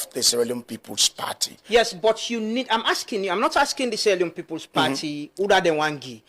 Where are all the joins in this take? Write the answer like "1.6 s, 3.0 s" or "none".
none